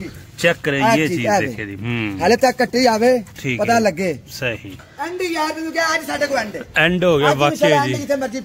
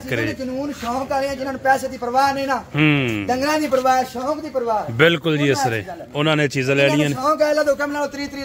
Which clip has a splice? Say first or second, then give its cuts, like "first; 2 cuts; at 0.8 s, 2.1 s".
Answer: first; 1 cut; at 4.9 s